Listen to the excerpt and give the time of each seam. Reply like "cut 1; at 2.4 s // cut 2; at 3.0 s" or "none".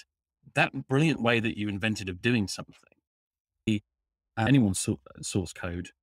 cut 1; at 3.7 s